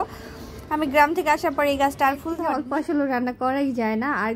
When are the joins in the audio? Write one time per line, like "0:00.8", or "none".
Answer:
0:02.7